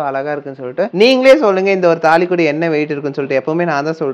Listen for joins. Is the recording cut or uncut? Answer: cut